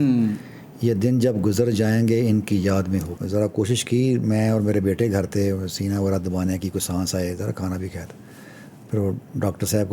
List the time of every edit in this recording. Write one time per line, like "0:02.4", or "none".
0:03.2